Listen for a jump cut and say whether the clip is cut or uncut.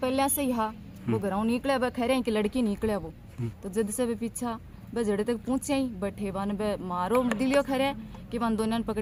uncut